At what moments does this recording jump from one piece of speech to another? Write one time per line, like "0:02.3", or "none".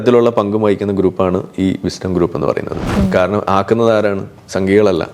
0:02.9